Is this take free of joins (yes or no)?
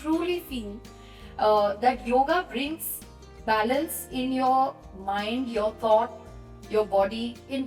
yes